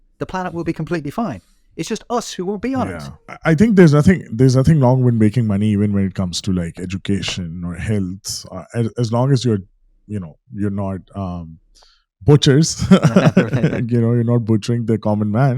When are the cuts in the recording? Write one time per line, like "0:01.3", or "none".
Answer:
0:03.2